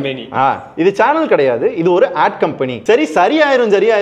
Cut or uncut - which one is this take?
cut